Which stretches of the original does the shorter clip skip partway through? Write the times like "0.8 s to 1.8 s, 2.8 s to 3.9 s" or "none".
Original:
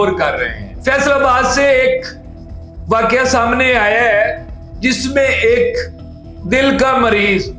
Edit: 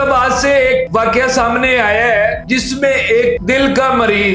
2.0 s to 2.8 s, 4.4 s to 4.7 s, 5.7 s to 6.4 s